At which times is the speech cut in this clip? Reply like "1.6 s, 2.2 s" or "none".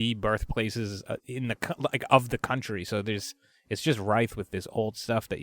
none